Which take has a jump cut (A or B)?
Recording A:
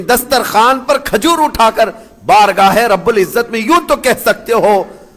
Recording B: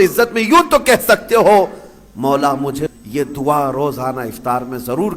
B